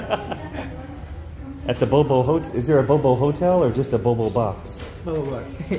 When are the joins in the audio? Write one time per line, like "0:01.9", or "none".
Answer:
none

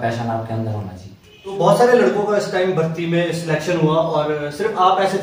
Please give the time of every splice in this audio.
0:01.5

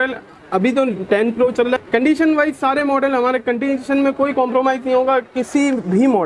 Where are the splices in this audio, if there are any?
0:01.8

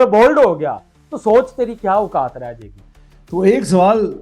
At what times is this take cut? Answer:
0:02.8

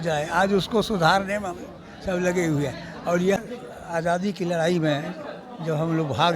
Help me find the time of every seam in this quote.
0:03.4

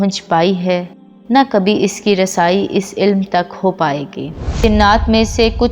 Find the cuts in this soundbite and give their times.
0:04.6

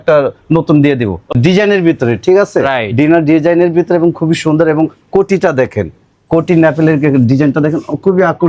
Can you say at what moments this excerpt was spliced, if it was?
0:01.4

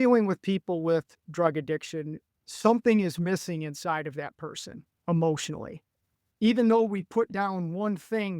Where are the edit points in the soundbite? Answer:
0:02.2

